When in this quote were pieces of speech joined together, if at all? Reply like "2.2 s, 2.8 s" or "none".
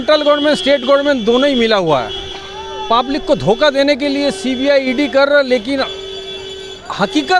none